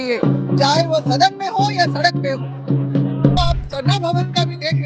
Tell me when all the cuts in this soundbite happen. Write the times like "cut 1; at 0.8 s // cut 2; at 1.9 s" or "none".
cut 1; at 3.4 s

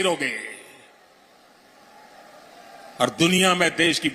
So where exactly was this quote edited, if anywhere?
none

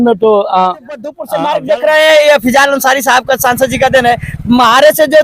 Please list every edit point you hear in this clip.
cut 1; at 1.2 s

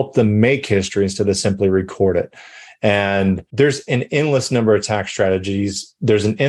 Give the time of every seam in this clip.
cut 1; at 3.5 s

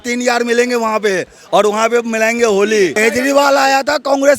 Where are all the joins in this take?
cut 1; at 3.0 s

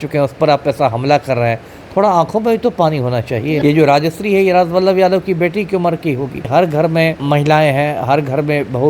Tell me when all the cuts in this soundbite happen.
cut 1; at 3.6 s // cut 2; at 6.5 s // cut 3; at 7.2 s

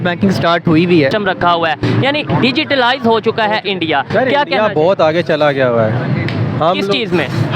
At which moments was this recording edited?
cut 1; at 1.1 s

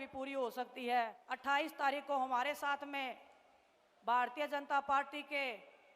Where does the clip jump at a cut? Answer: cut 1; at 1.2 s

